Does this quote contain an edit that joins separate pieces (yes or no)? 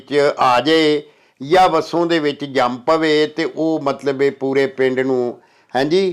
no